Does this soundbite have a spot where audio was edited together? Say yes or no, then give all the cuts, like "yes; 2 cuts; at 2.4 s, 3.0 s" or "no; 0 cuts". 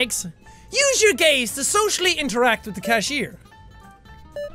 yes; 1 cut; at 1.0 s